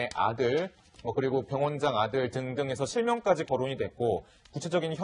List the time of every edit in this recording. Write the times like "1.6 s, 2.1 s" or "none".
3.3 s